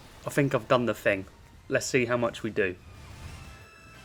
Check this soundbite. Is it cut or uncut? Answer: uncut